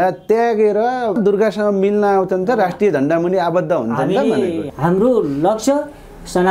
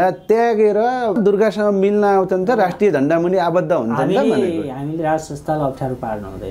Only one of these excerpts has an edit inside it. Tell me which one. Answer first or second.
first